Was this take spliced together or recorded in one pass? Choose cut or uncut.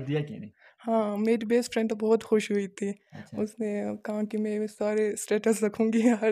uncut